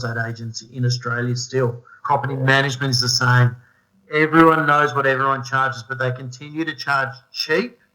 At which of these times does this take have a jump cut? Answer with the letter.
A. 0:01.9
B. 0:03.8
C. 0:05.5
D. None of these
A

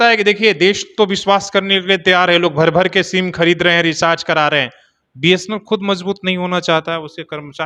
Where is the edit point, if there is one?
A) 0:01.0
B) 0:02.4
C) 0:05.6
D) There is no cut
D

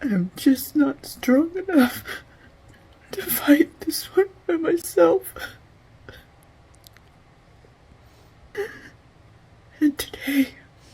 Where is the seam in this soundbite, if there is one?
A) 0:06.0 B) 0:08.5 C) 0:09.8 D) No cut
B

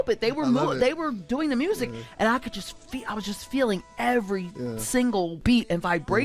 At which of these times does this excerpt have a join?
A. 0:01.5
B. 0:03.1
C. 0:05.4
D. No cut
C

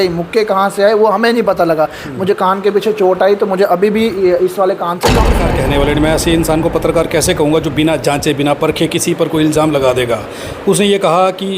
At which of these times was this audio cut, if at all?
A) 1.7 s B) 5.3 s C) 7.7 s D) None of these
B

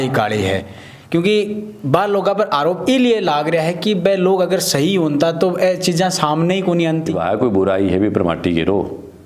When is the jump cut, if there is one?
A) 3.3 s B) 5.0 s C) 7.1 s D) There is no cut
C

